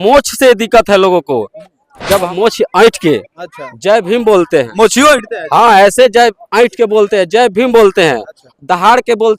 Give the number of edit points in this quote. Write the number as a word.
one